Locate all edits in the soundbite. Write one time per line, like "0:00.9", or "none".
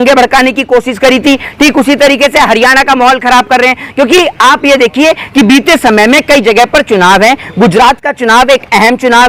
none